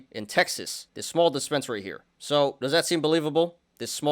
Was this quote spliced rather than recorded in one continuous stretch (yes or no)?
no